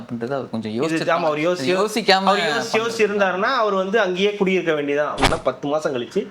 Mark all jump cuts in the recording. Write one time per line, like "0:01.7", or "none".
0:05.3

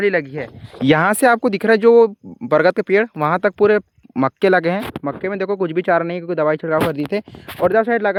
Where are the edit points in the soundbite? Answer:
none

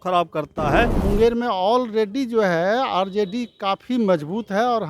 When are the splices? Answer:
0:01.0

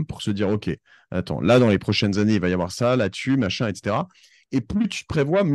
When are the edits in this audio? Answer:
none

